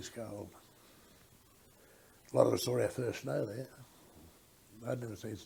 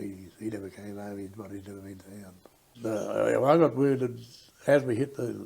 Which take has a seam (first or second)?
second